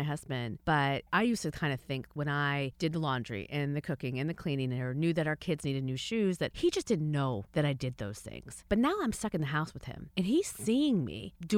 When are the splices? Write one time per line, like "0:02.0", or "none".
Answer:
0:01.1